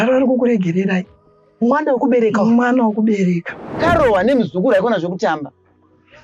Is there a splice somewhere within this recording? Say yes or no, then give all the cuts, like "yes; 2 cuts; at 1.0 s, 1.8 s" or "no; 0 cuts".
yes; 1 cut; at 3.8 s